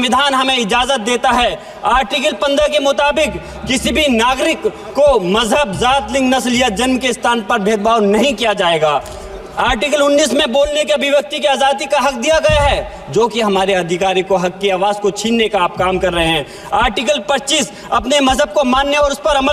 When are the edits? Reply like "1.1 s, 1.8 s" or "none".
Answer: none